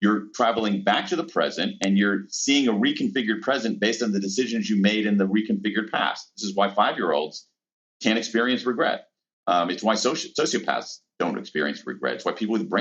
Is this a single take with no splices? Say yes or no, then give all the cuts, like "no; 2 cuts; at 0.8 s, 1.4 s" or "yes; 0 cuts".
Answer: no; 1 cut; at 6.4 s